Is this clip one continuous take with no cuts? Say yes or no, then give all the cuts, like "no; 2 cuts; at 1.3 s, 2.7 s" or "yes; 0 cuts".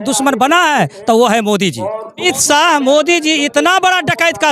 no; 1 cut; at 2.2 s